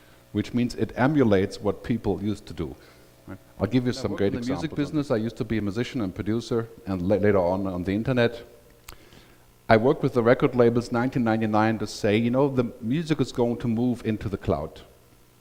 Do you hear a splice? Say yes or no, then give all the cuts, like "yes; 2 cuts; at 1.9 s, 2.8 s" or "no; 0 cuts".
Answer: no; 0 cuts